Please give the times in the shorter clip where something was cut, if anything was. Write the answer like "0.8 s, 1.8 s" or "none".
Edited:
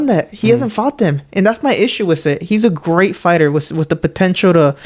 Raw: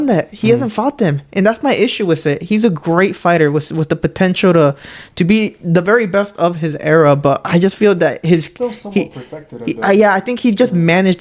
none